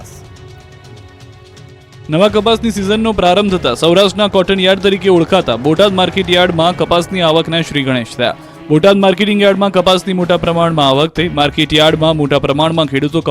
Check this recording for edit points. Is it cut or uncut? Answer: cut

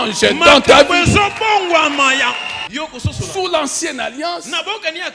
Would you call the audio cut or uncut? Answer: cut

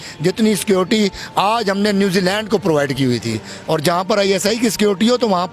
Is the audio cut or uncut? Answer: cut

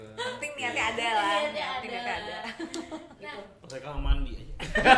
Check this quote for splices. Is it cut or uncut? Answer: cut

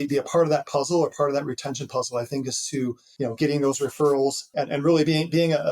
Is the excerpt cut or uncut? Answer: cut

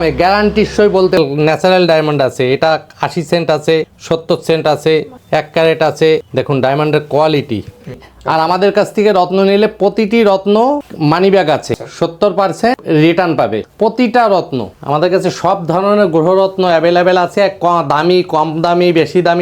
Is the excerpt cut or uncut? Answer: cut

